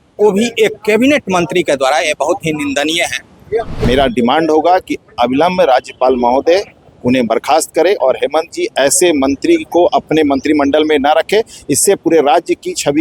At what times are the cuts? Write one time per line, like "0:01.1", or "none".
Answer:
0:03.7